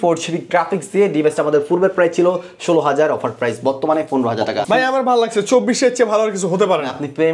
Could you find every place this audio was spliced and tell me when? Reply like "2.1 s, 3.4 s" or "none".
4.6 s